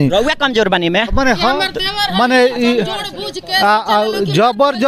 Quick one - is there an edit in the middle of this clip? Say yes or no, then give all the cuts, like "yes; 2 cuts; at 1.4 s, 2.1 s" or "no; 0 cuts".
no; 0 cuts